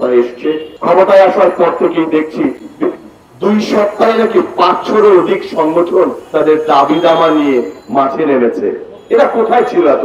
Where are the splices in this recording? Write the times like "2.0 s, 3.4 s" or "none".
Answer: none